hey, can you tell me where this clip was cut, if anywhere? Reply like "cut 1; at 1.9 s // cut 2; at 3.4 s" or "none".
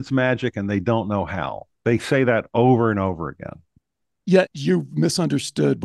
cut 1; at 4.5 s